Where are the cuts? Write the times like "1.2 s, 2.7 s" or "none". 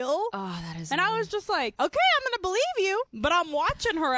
1.7 s, 3.1 s